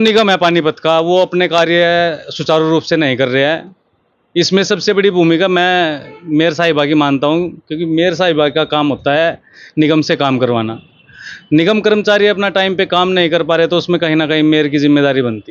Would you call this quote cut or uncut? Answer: uncut